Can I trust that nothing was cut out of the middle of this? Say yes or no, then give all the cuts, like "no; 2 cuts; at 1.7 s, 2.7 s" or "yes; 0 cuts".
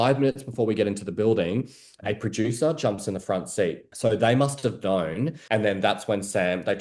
no; 2 cuts; at 3.9 s, 5.4 s